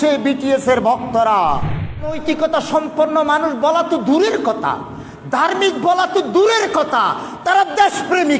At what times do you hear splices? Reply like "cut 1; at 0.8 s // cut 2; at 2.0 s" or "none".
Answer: cut 1; at 2.2 s